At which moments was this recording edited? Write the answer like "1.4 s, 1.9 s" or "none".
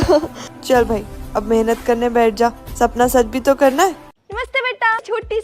4.1 s